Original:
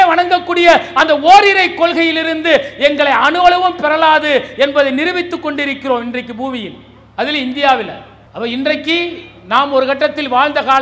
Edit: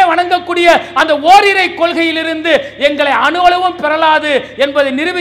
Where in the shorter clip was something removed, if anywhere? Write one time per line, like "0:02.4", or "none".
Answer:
none